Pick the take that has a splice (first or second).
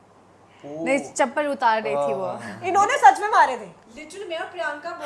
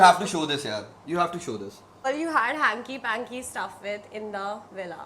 second